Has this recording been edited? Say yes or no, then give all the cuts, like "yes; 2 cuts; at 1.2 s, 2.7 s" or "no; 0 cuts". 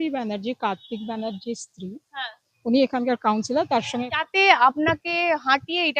yes; 1 cut; at 4.1 s